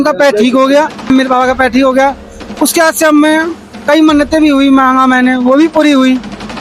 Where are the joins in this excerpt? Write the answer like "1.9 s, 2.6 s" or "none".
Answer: 1.1 s